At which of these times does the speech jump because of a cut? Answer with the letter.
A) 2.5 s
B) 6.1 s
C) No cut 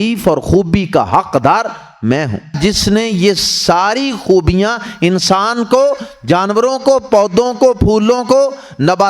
A